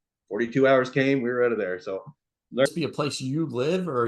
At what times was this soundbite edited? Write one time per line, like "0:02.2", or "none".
0:02.7